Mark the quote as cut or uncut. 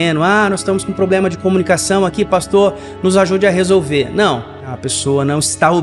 cut